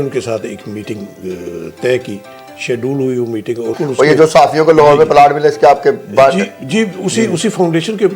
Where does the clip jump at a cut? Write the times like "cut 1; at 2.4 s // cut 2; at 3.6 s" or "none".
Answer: cut 1; at 3.8 s

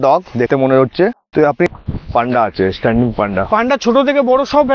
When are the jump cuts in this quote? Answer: cut 1; at 1.7 s

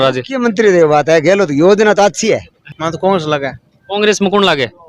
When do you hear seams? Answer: cut 1; at 2.7 s

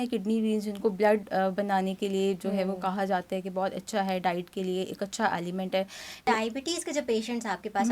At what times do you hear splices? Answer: cut 1; at 6.3 s

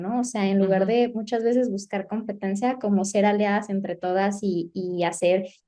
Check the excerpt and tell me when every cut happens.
none

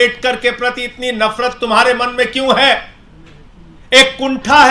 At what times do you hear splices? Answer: none

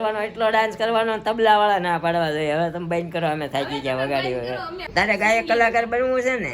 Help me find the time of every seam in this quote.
cut 1; at 4.8 s

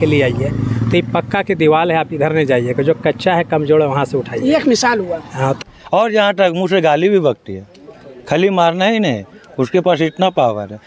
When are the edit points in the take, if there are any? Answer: cut 1; at 5.6 s

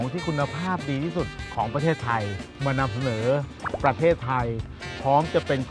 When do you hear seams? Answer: cut 1; at 2.4 s // cut 2; at 3.6 s

